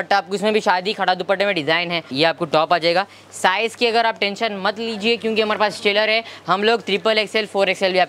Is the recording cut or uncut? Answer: cut